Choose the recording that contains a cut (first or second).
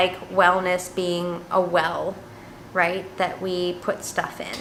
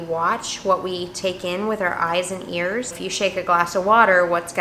second